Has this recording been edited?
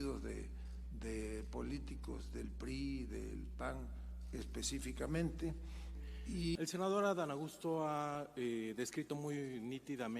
yes; 1 cut; at 6.6 s

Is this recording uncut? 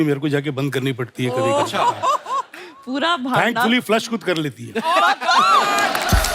yes; 0 cuts

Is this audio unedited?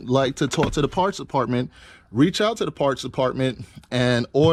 yes; 0 cuts

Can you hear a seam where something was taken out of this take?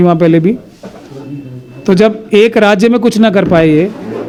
no; 0 cuts

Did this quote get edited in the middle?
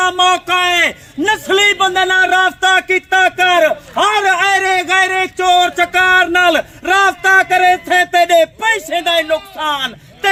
no; 0 cuts

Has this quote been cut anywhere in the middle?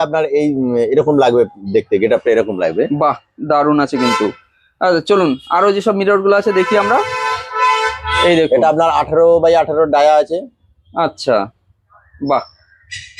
no; 0 cuts

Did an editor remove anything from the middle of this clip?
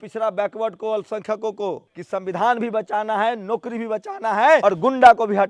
yes; 2 cuts; at 1.9 s, 4.6 s

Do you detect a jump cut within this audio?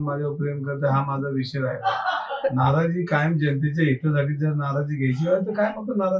no; 0 cuts

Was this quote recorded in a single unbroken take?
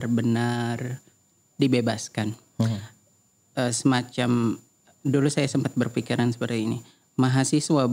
yes; 0 cuts

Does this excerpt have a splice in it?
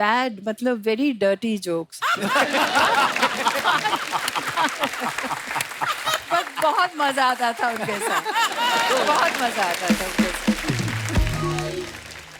no; 0 cuts

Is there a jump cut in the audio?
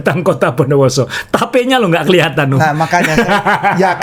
no; 0 cuts

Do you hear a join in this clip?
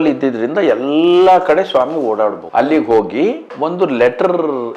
yes; 1 cut; at 3.5 s

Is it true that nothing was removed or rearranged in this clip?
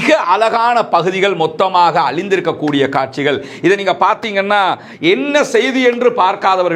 yes; 0 cuts

